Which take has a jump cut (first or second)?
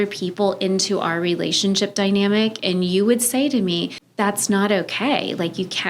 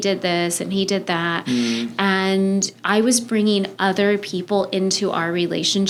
first